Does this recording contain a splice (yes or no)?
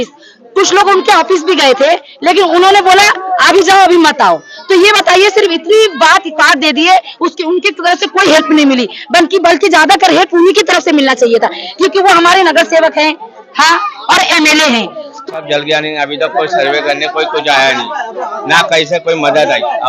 yes